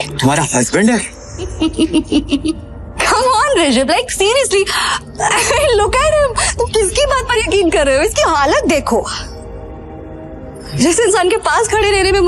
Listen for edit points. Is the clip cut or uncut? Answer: cut